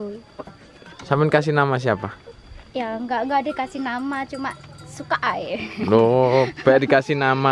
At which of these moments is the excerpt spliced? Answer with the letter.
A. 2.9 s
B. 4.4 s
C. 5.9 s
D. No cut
D